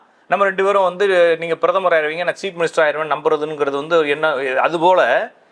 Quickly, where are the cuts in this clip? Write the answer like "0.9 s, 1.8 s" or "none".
none

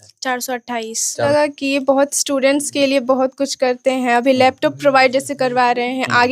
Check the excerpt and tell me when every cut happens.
1.2 s

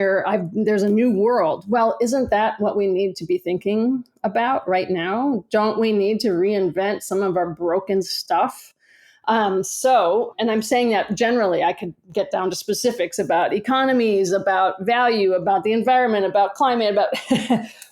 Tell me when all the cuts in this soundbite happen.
10.3 s

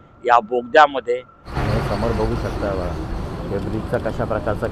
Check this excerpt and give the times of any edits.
1.5 s

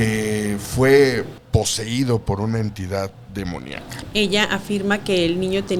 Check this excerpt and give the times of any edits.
1.4 s, 4.0 s

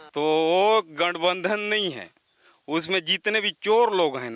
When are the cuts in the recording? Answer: none

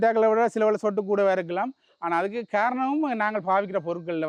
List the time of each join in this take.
none

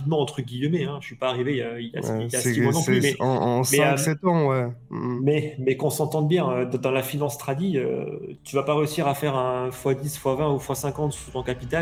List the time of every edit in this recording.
none

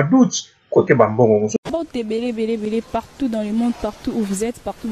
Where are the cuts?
1.5 s

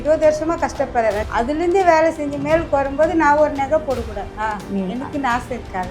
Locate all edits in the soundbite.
1.2 s

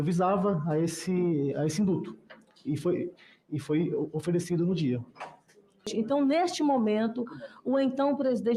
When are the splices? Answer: 5.9 s

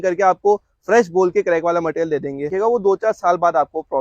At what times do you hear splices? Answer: 2.5 s

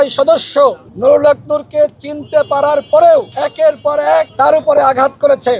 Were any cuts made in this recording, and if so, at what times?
0.9 s, 3.3 s, 4.3 s

